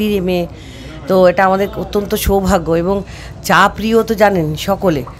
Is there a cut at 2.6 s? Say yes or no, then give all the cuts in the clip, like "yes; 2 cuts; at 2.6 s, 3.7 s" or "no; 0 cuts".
no; 0 cuts